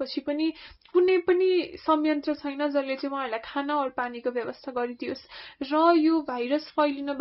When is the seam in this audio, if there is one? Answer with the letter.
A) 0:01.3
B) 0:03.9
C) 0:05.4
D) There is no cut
D